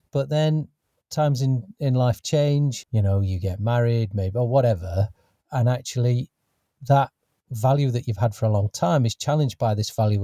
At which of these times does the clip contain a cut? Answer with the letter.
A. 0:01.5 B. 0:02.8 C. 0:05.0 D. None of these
B